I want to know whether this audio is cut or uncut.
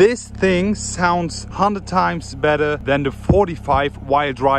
cut